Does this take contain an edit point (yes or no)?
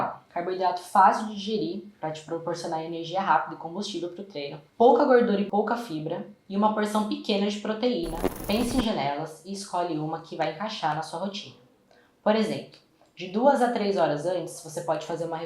yes